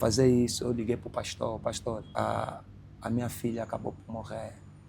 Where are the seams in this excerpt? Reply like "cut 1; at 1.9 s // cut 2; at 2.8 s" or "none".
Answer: cut 1; at 2.0 s